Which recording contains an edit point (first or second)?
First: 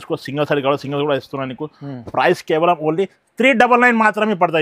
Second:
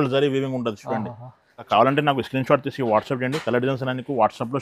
second